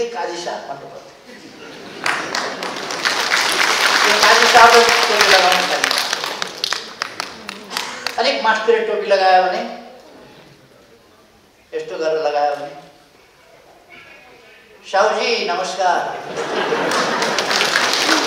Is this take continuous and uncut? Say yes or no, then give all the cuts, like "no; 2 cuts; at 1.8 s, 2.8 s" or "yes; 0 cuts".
no; 1 cut; at 8.2 s